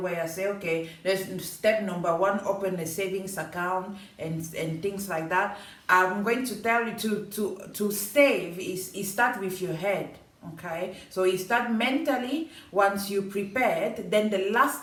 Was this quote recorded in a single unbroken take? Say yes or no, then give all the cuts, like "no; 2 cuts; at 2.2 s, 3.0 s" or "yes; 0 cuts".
yes; 0 cuts